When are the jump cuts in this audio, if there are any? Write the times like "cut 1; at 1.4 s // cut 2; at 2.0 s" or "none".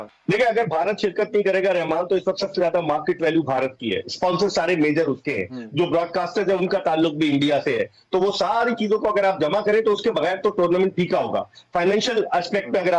none